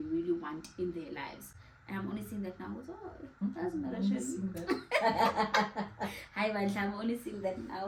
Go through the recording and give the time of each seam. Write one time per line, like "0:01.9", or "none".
none